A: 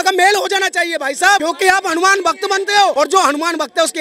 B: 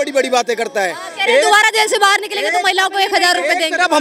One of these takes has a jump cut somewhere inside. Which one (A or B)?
A